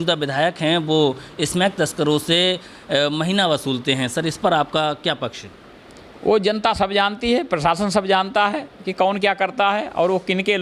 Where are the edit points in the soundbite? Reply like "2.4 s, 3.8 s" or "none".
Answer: none